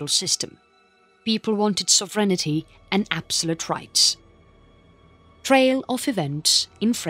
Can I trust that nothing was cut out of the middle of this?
yes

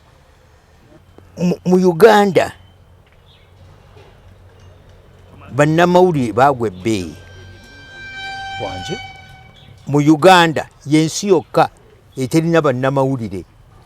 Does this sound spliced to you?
yes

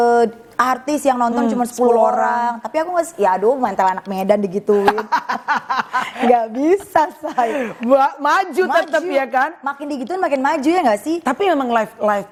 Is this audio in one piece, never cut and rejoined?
yes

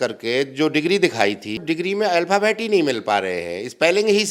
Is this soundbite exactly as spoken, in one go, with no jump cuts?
no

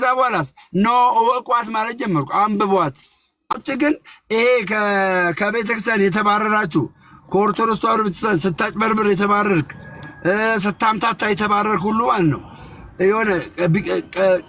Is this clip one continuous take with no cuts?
no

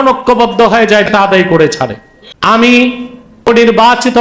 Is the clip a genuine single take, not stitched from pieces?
no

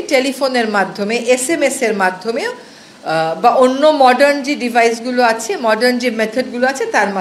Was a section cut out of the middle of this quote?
no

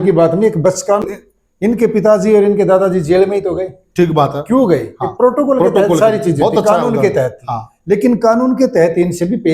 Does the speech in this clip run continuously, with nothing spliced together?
no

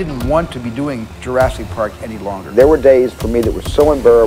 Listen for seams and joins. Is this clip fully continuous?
no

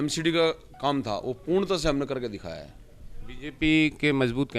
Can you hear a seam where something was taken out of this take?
no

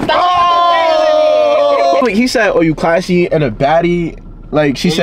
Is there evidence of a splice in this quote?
yes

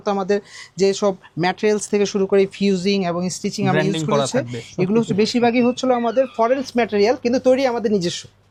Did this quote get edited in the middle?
no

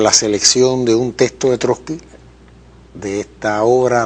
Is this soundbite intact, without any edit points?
no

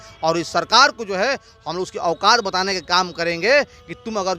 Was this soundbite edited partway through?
no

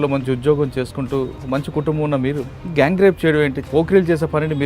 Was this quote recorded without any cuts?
no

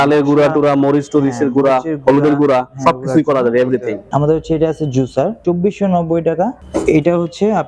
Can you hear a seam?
yes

